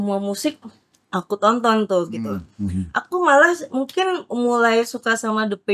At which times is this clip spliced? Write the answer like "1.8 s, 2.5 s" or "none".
none